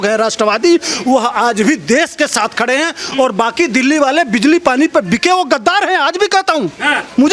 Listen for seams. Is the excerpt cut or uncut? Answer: uncut